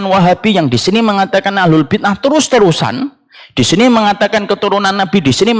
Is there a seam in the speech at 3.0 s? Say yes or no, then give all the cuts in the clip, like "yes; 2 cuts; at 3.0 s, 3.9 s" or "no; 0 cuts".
no; 0 cuts